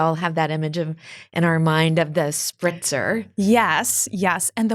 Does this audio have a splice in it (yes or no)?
no